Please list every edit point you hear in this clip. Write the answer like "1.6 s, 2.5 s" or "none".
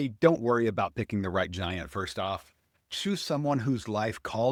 none